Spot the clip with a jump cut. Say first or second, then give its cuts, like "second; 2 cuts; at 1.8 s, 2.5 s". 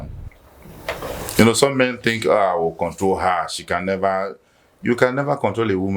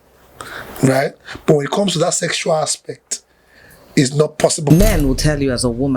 second; 1 cut; at 4.7 s